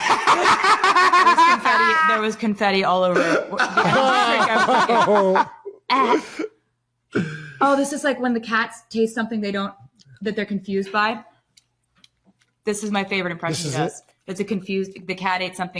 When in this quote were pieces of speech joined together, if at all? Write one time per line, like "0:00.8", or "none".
none